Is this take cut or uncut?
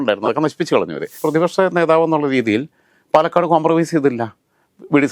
cut